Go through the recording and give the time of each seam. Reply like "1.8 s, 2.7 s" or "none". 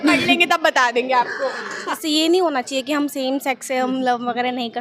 2.0 s